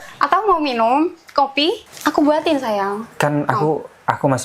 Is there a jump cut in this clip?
yes; 1 cut; at 1.9 s

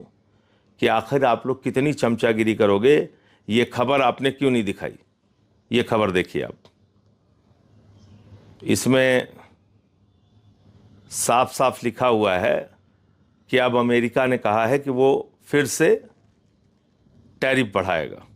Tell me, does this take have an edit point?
no; 0 cuts

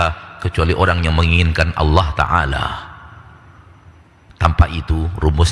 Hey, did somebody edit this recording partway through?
no; 0 cuts

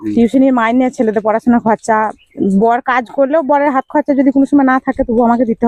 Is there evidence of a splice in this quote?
no; 0 cuts

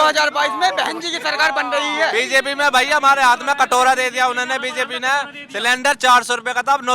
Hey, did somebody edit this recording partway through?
yes; 1 cut; at 2.1 s

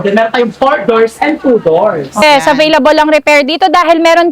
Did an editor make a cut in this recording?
yes; 1 cut; at 2.2 s

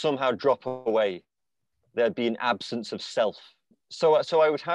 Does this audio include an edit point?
yes; 1 cut; at 3.8 s

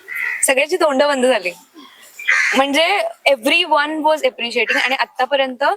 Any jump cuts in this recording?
no; 0 cuts

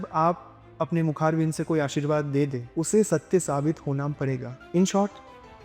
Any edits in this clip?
yes; 2 cuts; at 2.6 s, 4.5 s

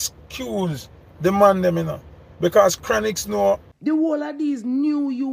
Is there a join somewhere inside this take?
yes; 1 cut; at 3.7 s

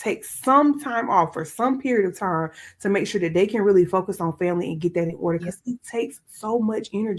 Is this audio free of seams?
yes; 0 cuts

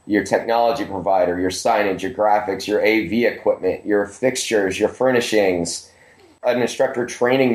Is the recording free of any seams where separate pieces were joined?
no; 1 cut; at 6.4 s

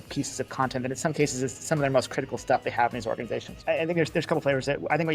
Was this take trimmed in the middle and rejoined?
yes; 1 cut; at 3.5 s

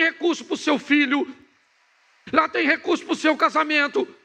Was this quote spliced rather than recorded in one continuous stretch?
no; 0 cuts

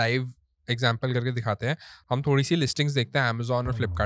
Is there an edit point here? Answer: no; 0 cuts

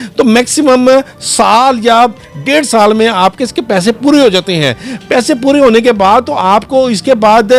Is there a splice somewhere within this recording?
no; 0 cuts

